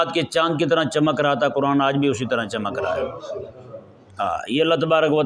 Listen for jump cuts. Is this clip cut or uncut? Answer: uncut